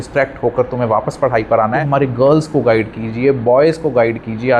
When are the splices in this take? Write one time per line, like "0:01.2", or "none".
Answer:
0:01.8